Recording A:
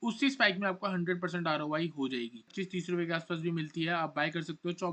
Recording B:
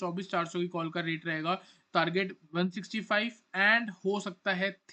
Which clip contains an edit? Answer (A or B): A